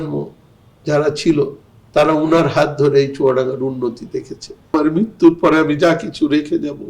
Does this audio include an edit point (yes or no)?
yes